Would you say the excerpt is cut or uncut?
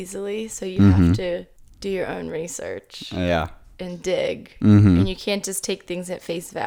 uncut